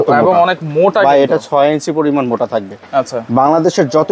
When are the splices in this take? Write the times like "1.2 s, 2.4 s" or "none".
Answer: none